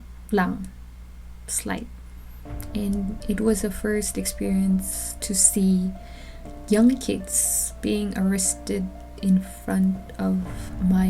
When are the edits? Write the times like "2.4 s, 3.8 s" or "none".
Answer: none